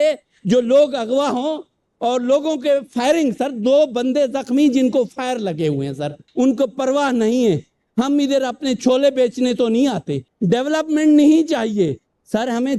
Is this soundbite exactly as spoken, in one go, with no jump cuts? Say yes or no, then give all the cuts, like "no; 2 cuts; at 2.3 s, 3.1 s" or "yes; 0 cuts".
no; 2 cuts; at 6.2 s, 10.2 s